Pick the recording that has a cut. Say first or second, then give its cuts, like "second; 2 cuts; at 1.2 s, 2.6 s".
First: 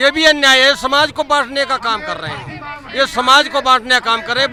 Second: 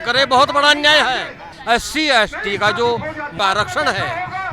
second; 2 cuts; at 1.5 s, 3.3 s